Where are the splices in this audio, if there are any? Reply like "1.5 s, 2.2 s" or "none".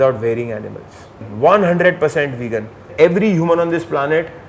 1.2 s, 2.9 s